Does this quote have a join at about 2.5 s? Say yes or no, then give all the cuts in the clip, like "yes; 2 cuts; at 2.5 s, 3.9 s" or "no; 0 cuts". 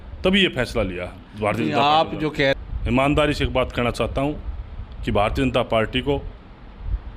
yes; 1 cut; at 2.5 s